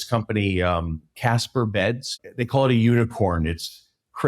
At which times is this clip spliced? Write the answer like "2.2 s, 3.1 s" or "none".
1.1 s, 2.2 s